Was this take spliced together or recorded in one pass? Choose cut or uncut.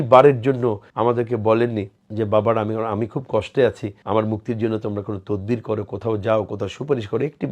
cut